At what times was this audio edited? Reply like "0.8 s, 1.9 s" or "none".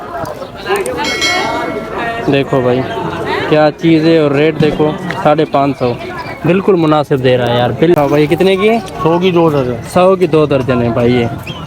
7.9 s